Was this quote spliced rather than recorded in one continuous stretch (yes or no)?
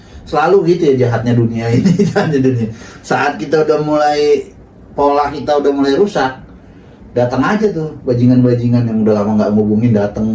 no